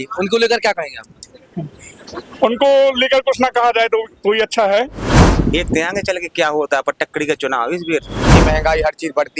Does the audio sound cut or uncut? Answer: cut